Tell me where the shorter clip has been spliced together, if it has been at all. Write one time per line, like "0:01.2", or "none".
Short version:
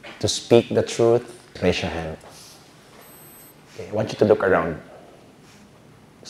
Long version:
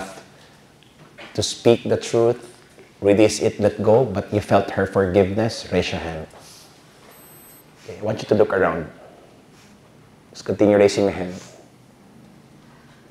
0:01.5